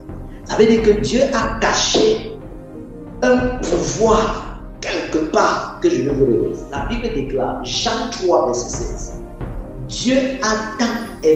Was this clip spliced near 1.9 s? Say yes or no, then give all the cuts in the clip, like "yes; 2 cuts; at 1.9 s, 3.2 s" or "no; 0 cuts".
no; 1 cut; at 6.7 s